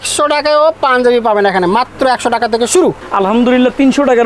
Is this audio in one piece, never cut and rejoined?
no; 1 cut; at 3.0 s

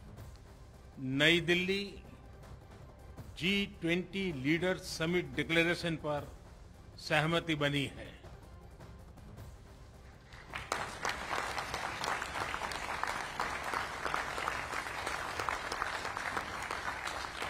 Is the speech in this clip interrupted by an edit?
yes; 3 cuts; at 0.9 s, 1.9 s, 3.4 s

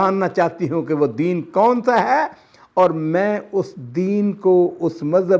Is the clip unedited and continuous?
yes; 0 cuts

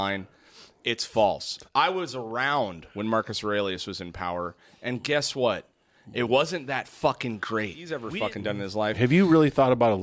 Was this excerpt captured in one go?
no; 1 cut; at 8.1 s

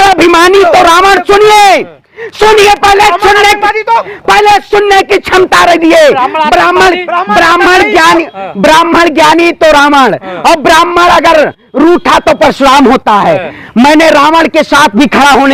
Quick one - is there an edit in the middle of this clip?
no; 0 cuts

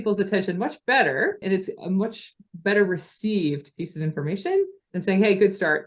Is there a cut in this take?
yes; 2 cuts; at 1.4 s, 4.9 s

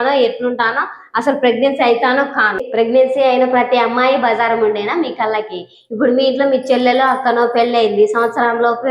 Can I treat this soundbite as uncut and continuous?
no; 1 cut; at 2.6 s

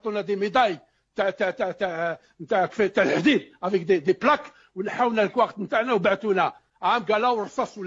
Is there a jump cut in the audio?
yes; 1 cut; at 6.7 s

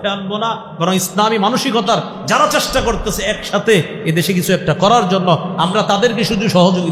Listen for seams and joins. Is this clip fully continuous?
yes; 0 cuts

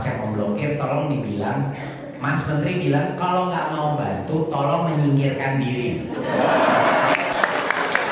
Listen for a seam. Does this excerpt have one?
no; 0 cuts

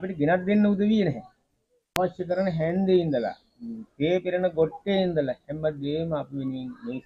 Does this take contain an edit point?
yes; 1 cut; at 1.8 s

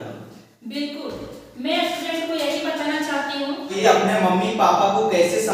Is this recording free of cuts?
no; 1 cut; at 3.8 s

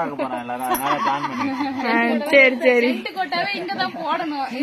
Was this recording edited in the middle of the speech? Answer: no; 0 cuts

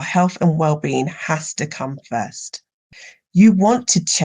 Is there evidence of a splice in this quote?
yes; 1 cut; at 2.9 s

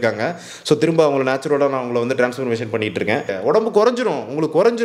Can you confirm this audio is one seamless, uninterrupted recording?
no; 1 cut; at 3.3 s

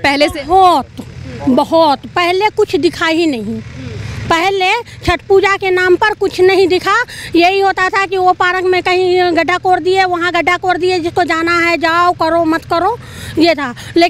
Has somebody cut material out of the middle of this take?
no; 0 cuts

